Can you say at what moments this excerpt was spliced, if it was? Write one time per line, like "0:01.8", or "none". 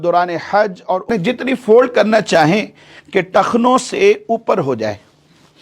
0:01.1

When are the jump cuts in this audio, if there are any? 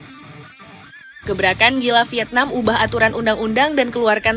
0:01.0

